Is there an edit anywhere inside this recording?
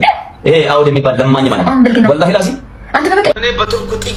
no; 0 cuts

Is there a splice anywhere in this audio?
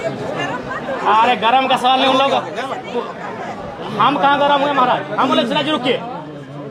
no; 0 cuts

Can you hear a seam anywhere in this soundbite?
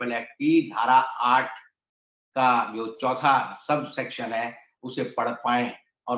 no; 0 cuts

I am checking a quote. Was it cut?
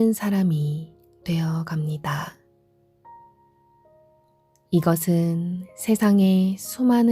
yes; 2 cuts; at 2.5 s, 4.7 s

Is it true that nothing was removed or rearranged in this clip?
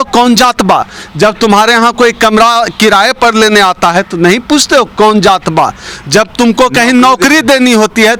yes; 0 cuts

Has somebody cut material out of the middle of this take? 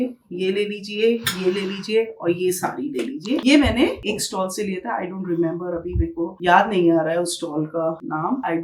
no; 0 cuts

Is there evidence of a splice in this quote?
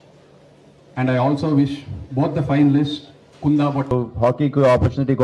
yes; 1 cut; at 3.9 s

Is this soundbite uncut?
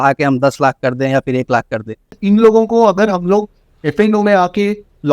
no; 1 cut; at 2.2 s

